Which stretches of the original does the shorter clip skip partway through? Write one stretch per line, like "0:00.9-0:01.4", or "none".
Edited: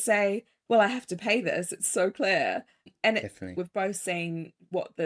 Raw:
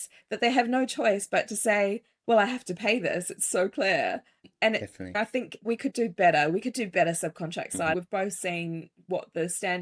0:05.2-0:07.9